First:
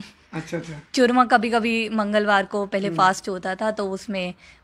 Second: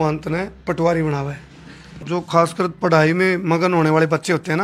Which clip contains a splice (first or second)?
second